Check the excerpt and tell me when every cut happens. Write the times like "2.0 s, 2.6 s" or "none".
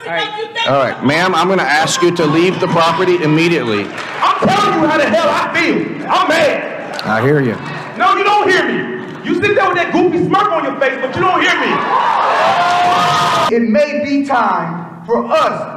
4.0 s, 13.5 s